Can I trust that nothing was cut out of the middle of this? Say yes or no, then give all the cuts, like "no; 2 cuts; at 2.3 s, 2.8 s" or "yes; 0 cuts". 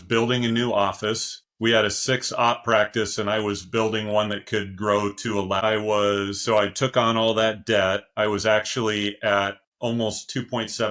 yes; 0 cuts